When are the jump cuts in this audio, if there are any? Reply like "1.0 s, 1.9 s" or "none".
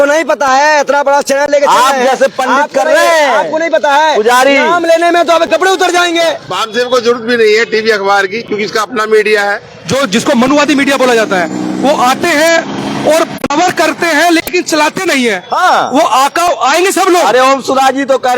6.5 s, 9.7 s